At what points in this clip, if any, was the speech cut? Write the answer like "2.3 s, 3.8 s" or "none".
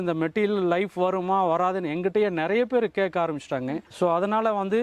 none